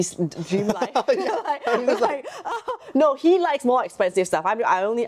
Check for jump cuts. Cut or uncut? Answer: uncut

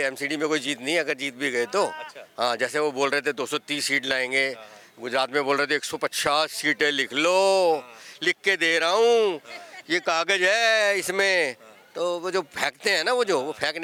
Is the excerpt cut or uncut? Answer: uncut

